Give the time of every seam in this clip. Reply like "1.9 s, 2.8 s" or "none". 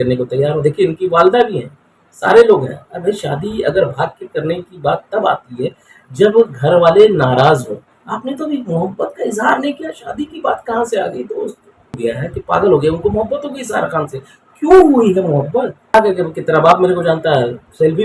12.0 s, 15.9 s